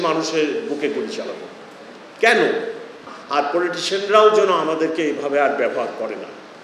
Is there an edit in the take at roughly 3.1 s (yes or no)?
yes